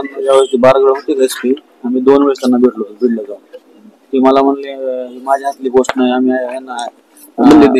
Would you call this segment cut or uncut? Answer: uncut